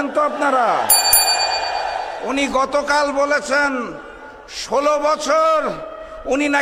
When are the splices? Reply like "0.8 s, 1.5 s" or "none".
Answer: none